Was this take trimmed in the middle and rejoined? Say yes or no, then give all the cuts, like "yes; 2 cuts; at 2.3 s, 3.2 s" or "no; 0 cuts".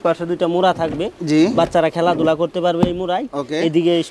no; 0 cuts